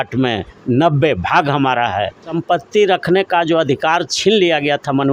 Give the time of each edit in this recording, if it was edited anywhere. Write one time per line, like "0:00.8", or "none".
0:02.3